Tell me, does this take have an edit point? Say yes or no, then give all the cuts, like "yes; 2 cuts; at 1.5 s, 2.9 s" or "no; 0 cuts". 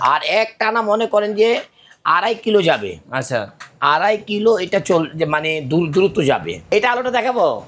yes; 1 cut; at 6.7 s